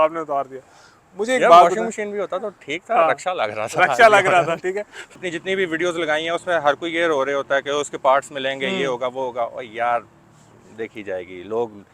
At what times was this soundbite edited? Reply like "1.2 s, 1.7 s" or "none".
5.2 s